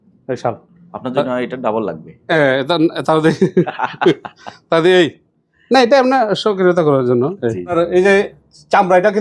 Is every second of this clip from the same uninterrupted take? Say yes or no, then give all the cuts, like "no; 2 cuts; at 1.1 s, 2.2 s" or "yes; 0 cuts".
no; 1 cut; at 7.7 s